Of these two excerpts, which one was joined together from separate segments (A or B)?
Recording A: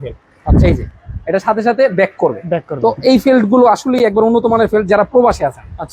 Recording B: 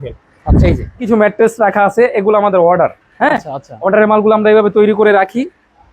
B